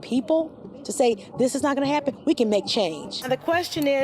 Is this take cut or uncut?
cut